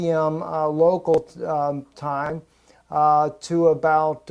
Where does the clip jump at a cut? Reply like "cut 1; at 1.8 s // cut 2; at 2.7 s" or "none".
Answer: none